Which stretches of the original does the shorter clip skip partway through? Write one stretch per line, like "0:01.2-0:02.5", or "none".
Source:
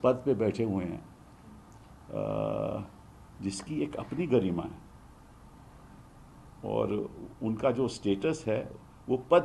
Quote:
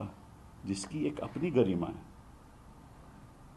none